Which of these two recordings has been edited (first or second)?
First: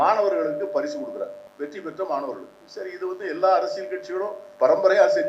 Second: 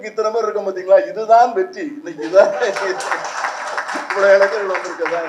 first